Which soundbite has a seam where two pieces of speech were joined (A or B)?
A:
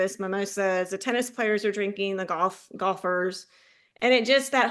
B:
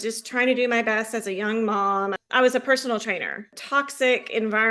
B